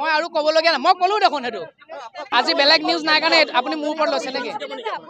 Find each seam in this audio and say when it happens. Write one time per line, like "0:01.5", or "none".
0:02.3